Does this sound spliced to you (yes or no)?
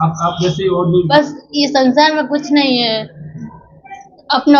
yes